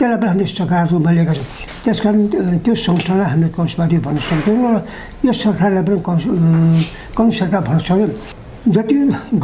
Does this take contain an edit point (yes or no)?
yes